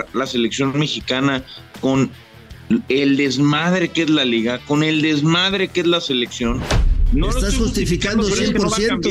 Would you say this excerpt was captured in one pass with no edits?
no; 1 cut; at 7.1 s

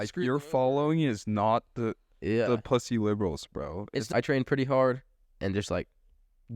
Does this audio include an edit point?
yes; 1 cut; at 4.1 s

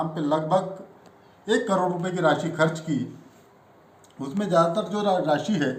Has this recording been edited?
no; 0 cuts

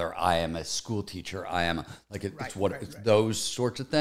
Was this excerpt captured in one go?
yes; 0 cuts

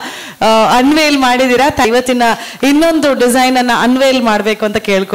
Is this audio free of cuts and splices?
no; 1 cut; at 1.9 s

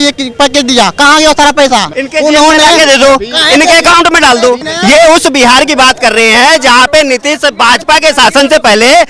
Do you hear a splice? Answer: yes; 2 cuts; at 2.0 s, 4.7 s

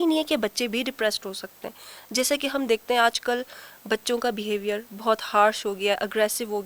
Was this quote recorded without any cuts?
yes; 0 cuts

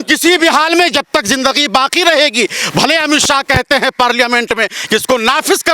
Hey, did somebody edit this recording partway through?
no; 0 cuts

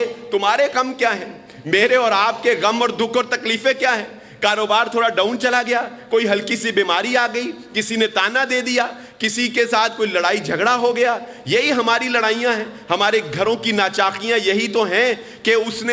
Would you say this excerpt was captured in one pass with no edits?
yes; 0 cuts

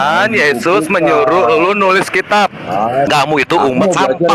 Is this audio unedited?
no; 1 cut; at 3.1 s

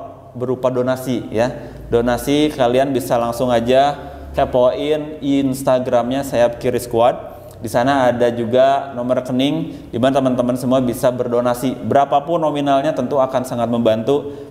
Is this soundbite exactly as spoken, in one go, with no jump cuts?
yes; 0 cuts

